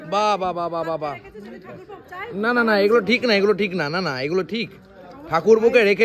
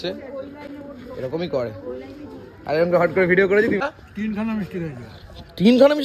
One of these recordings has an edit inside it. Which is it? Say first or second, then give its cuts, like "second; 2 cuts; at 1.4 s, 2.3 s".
second; 1 cut; at 3.8 s